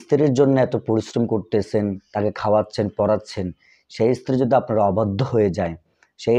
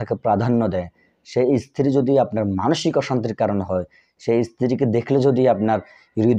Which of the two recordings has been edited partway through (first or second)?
first